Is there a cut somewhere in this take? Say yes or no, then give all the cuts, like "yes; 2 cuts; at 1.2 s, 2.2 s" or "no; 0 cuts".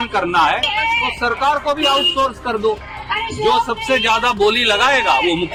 no; 0 cuts